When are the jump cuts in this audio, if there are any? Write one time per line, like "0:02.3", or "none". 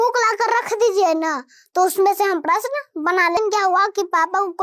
0:03.4